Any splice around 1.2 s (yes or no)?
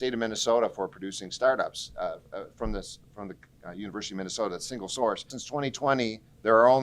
no